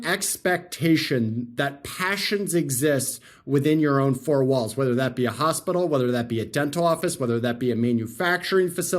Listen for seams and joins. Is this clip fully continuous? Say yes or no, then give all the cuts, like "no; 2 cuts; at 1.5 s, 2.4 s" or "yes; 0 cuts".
yes; 0 cuts